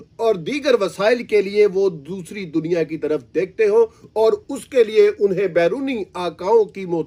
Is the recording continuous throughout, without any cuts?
yes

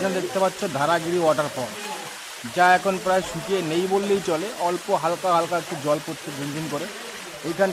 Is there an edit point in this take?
no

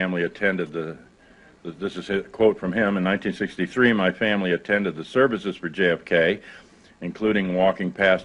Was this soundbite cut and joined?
yes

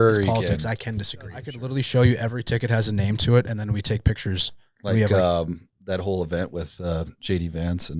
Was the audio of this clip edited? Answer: yes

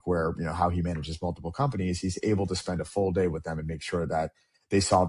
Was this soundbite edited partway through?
no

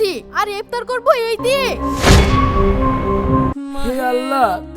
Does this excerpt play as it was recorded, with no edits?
no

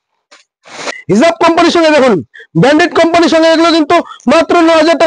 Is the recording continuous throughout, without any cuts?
no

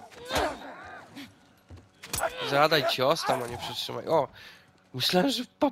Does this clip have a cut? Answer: no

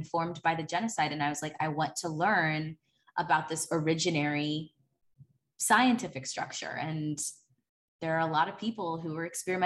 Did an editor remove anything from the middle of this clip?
no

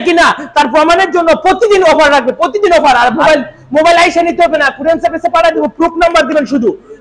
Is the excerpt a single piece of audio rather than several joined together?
yes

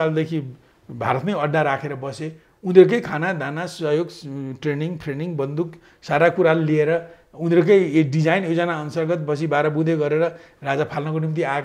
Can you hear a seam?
no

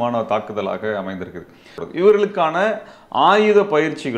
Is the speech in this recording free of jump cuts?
no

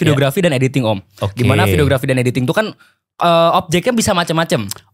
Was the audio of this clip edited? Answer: no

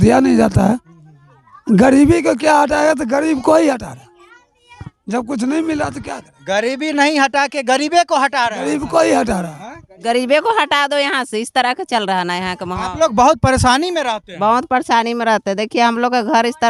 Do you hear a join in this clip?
no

